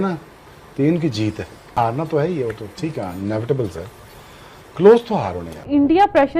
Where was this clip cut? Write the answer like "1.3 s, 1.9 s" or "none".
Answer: 1.8 s, 5.6 s